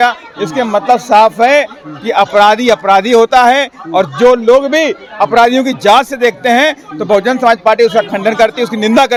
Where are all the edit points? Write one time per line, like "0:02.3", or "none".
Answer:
none